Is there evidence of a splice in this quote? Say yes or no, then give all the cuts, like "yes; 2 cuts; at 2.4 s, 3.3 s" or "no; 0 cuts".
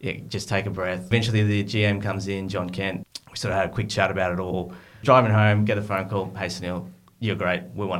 yes; 3 cuts; at 1.1 s, 3.0 s, 5.0 s